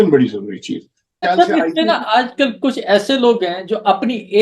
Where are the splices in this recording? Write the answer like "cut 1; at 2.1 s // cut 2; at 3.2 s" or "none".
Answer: cut 1; at 1.3 s